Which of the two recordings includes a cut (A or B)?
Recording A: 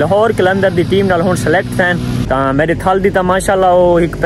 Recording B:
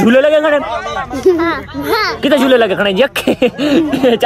A